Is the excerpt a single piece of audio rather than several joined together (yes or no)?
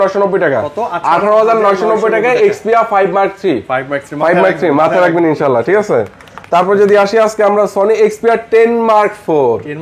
yes